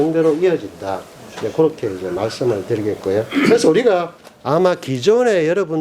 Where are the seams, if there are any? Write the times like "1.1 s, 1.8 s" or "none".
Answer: 4.2 s

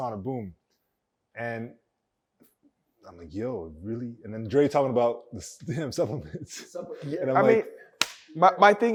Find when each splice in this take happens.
none

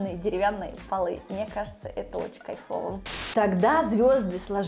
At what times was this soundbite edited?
3.0 s

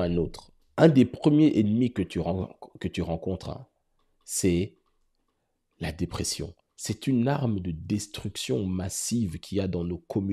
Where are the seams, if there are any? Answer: none

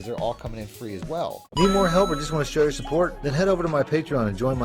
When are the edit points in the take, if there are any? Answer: 1.5 s

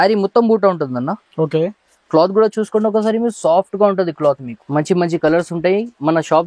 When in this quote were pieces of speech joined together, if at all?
4.5 s

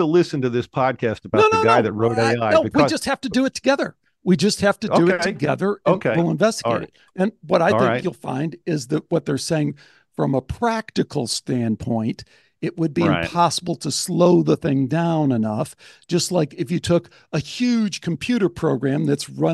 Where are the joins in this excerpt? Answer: none

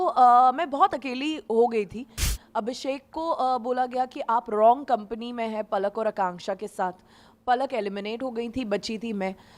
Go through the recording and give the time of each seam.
2.3 s

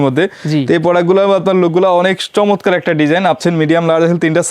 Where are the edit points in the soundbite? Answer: 3.4 s

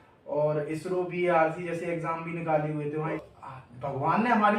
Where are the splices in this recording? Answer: 3.2 s

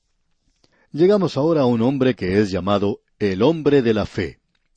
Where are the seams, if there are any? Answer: 3.8 s

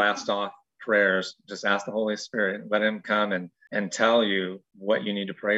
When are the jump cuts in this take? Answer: 3.6 s, 4.7 s

